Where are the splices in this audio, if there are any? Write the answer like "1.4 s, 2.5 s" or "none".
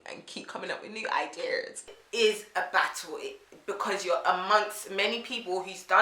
2.0 s